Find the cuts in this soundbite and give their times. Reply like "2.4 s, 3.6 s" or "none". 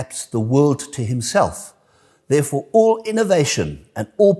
none

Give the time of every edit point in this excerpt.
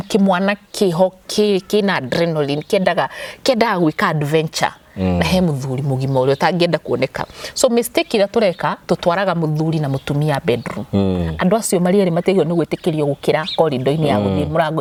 none

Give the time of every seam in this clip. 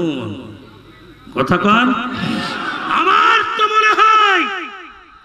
2.7 s

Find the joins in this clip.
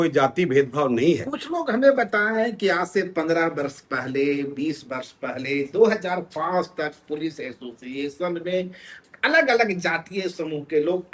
none

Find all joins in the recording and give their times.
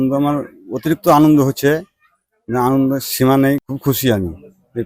3.6 s

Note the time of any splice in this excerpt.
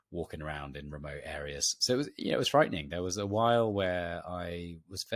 1.8 s

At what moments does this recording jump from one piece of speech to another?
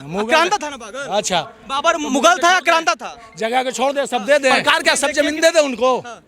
4.6 s

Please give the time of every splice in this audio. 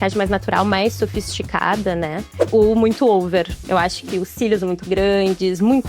2.3 s

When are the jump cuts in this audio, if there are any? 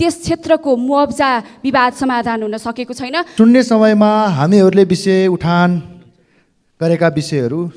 3.3 s

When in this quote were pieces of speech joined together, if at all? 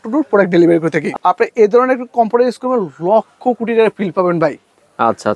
1.0 s

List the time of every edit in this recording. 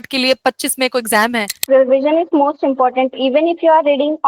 1.6 s

